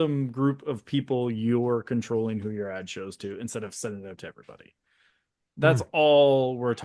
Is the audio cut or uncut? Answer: uncut